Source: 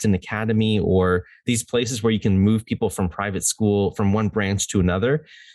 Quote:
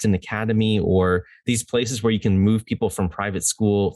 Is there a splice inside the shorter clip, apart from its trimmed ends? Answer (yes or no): no